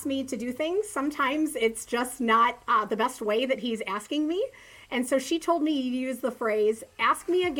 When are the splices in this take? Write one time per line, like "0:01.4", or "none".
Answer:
none

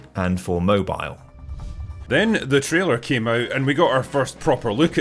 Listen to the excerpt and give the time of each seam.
0:01.8

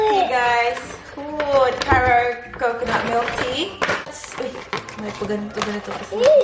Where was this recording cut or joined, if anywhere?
0:04.2

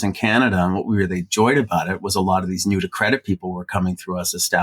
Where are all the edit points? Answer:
none

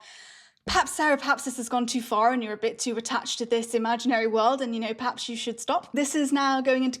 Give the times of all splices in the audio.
0:06.0

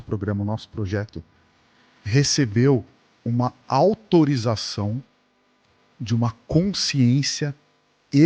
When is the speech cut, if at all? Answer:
none

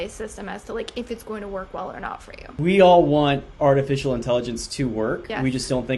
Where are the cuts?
0:02.4

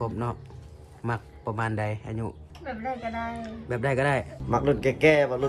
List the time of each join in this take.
0:02.5
0:04.4

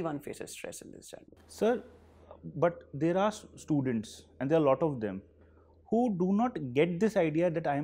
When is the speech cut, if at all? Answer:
none

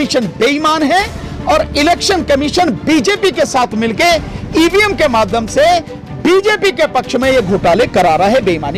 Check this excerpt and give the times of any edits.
none

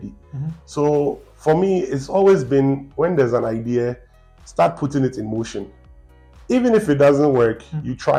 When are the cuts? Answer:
none

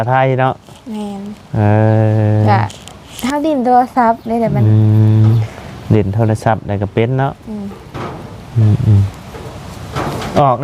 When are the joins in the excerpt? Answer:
none

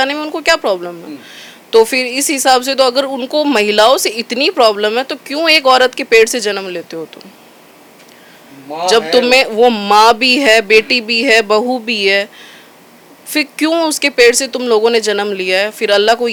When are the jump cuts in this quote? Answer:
none

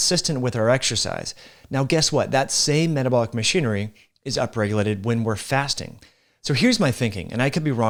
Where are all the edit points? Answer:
none

